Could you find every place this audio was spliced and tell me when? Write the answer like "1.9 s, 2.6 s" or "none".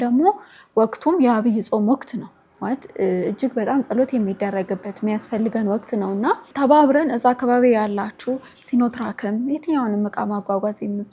none